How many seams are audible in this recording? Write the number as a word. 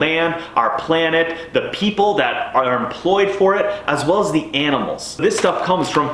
one